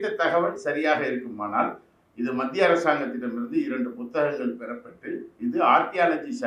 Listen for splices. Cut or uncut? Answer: uncut